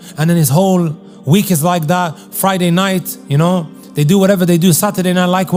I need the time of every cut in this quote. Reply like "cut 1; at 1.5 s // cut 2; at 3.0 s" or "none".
none